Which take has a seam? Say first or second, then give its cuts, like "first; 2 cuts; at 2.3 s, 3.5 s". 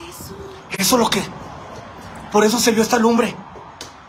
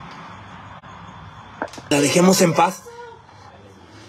second; 1 cut; at 1.9 s